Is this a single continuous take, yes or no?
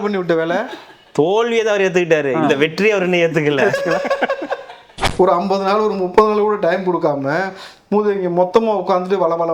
no